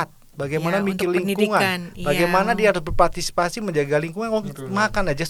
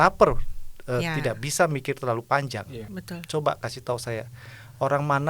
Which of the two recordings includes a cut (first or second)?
second